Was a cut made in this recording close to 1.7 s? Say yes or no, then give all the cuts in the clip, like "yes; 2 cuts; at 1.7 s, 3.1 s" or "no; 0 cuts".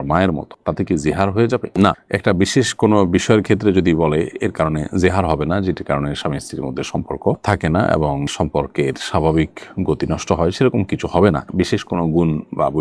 no; 0 cuts